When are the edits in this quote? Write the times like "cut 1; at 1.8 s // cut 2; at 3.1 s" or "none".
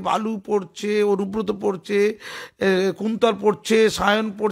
none